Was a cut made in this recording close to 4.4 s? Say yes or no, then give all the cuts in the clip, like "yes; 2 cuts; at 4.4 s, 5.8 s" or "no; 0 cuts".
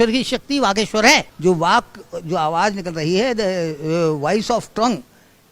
no; 1 cut; at 1.3 s